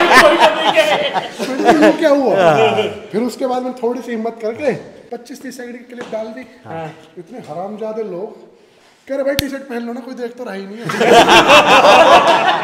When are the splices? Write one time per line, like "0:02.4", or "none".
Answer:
0:04.9